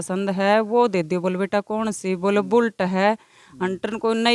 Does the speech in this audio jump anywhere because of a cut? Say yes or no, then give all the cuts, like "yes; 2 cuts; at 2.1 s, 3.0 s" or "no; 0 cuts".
no; 0 cuts